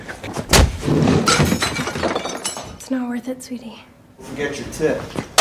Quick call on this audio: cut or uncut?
cut